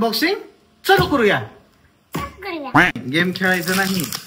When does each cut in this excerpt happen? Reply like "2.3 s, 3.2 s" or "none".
3.0 s